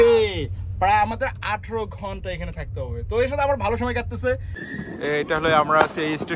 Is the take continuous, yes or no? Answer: no